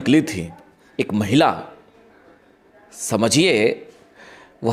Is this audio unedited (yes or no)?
yes